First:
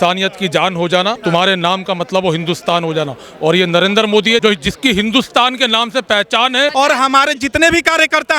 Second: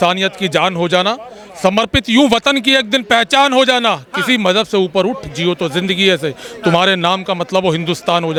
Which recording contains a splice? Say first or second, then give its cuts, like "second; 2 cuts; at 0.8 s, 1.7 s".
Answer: first; 3 cuts; at 1.2 s, 4.4 s, 6.7 s